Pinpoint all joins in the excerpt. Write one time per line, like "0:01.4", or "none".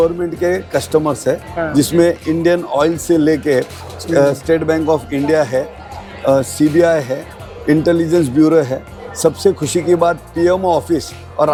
none